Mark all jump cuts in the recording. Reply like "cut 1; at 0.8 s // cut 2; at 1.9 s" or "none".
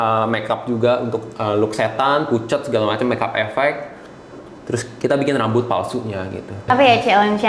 none